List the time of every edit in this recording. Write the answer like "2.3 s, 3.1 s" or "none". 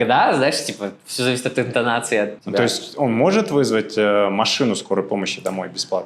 2.3 s

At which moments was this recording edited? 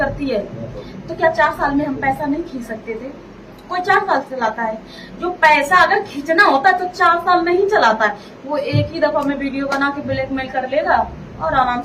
none

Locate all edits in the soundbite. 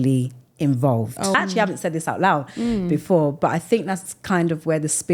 1.3 s

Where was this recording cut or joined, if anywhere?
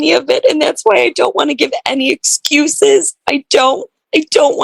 none

